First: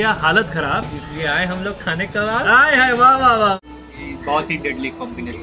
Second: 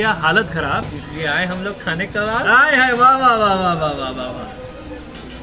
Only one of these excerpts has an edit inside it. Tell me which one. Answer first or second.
first